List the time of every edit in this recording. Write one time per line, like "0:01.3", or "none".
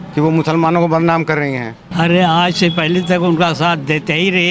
0:01.8